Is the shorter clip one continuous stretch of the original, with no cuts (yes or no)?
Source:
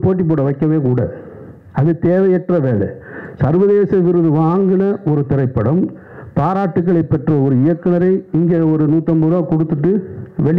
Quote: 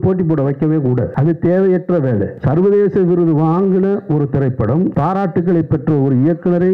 no